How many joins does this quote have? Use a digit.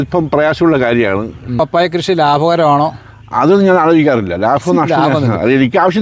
1